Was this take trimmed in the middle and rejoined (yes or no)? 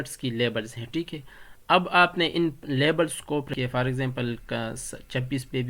yes